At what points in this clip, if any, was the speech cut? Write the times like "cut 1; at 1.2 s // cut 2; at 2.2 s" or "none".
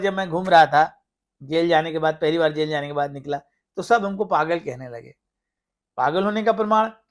none

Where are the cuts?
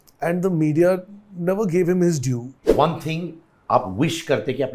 cut 1; at 2.5 s

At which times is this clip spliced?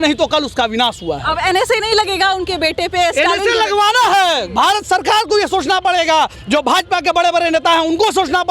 none

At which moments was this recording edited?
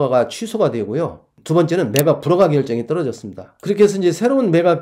none

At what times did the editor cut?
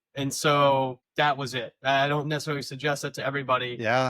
cut 1; at 1.0 s

